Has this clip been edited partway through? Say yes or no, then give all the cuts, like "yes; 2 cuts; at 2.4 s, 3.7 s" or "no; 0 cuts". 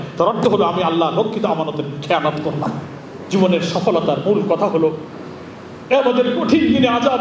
yes; 1 cut; at 3.1 s